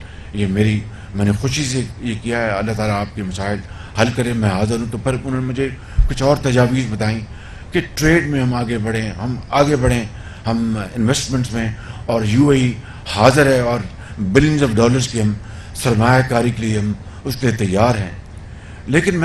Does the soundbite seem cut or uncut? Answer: uncut